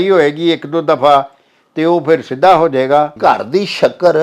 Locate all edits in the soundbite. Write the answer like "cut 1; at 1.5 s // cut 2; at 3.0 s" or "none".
cut 1; at 3.1 s